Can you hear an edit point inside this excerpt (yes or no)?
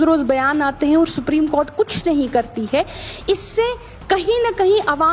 no